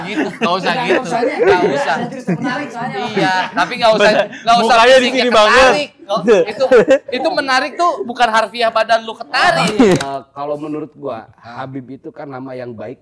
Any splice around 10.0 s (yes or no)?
yes